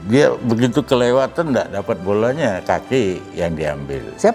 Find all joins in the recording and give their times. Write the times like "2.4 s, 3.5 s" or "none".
none